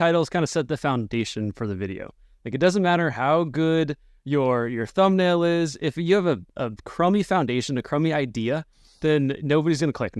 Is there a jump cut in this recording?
no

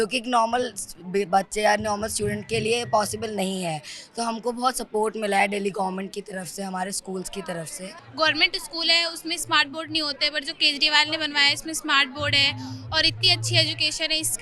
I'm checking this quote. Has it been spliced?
yes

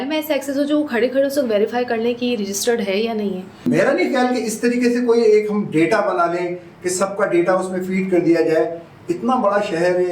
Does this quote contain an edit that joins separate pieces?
yes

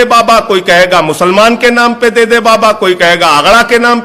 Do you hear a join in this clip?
no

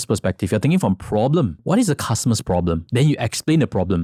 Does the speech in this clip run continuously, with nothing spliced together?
no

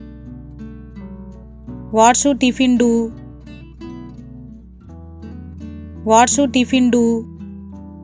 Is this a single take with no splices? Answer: yes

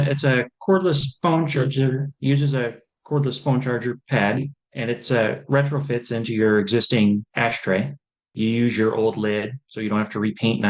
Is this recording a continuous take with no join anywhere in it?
no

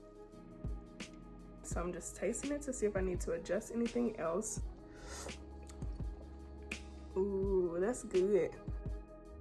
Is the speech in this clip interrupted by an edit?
yes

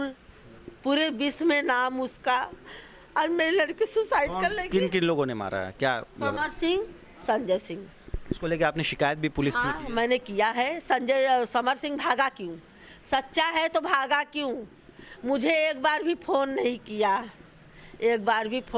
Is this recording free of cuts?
yes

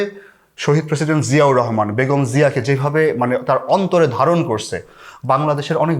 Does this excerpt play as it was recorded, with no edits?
yes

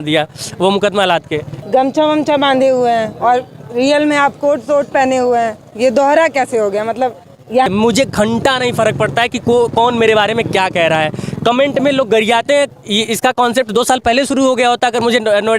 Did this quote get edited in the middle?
yes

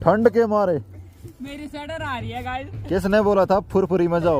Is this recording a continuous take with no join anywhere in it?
yes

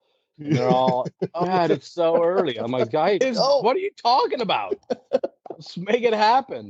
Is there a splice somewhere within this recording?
no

